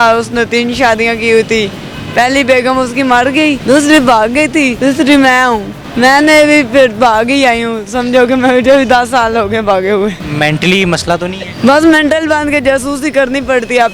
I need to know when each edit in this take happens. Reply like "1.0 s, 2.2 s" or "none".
3.6 s, 4.7 s, 5.8 s, 10.2 s, 11.5 s